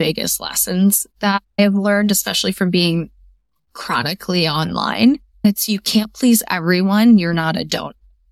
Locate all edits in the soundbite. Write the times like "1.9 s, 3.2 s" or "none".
1.6 s, 5.5 s